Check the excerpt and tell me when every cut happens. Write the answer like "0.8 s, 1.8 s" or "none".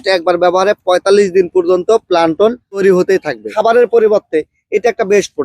3.5 s